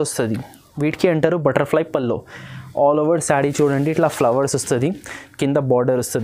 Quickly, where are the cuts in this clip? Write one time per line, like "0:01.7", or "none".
none